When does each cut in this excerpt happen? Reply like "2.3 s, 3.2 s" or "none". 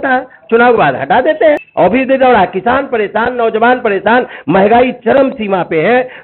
1.7 s